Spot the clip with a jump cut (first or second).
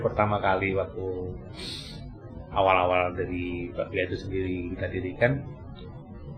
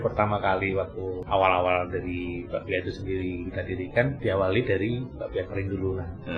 second